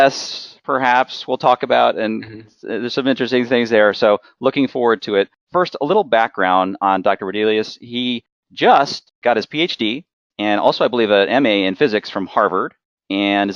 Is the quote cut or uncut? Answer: cut